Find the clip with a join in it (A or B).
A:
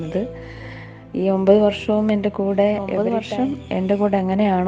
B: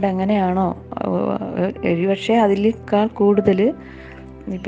A